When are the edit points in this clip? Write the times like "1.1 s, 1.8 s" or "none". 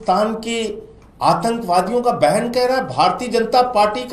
none